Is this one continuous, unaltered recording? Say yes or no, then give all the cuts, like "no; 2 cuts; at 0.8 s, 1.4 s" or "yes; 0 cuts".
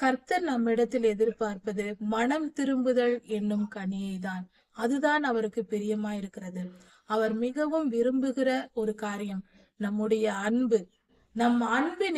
yes; 0 cuts